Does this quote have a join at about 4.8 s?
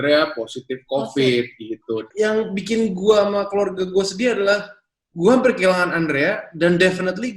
no; 1 cut; at 2.1 s

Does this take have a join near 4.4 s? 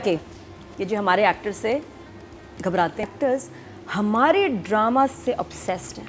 no; 1 cut; at 3.0 s

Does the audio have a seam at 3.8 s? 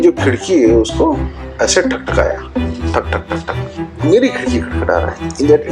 yes; 1 cut; at 3.8 s

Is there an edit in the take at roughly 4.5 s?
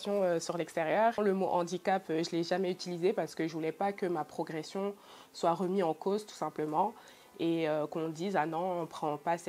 no; 1 cut; at 1.2 s

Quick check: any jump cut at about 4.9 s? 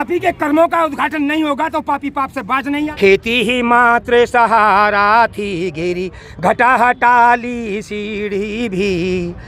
no; 1 cut; at 2.9 s

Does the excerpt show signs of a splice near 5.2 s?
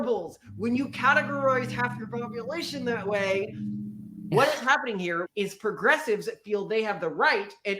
yes; 2 cuts; at 4.3 s, 5.2 s

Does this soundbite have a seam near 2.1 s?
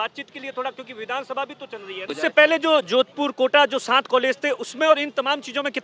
yes; 1 cut; at 2.1 s

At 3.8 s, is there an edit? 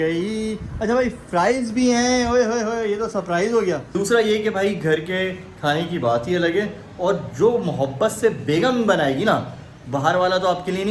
yes; 1 cut; at 3.8 s

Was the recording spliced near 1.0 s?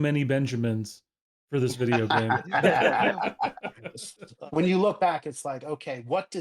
no; 1 cut; at 4.3 s

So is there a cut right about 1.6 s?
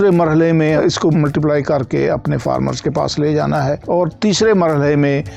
no; 0 cuts

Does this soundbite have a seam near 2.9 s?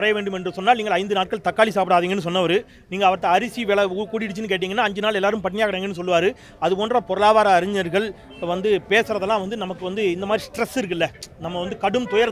no; 0 cuts

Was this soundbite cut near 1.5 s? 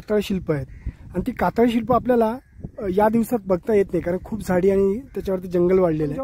no; 0 cuts

